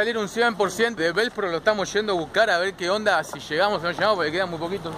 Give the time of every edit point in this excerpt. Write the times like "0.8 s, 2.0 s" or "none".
1.0 s